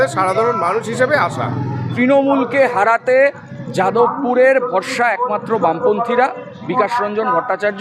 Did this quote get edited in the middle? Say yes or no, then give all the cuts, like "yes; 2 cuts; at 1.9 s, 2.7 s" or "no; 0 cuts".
yes; 1 cut; at 1.8 s